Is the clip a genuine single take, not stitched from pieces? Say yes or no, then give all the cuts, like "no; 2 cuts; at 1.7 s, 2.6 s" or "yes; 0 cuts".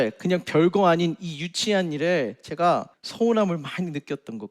no; 1 cut; at 3.0 s